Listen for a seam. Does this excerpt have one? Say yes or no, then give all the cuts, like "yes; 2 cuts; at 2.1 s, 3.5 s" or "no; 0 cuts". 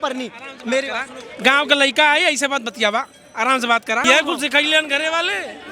yes; 1 cut; at 4.0 s